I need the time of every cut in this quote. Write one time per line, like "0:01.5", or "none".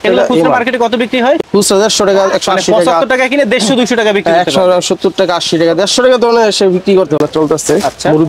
0:01.4
0:07.2